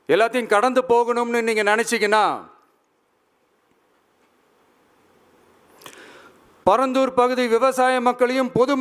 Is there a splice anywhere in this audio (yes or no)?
no